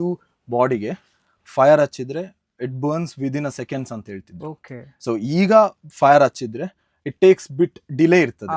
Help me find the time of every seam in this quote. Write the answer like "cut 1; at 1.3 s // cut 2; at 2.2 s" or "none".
none